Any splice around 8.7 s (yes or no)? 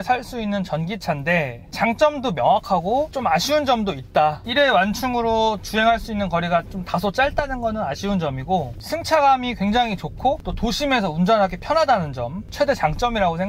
no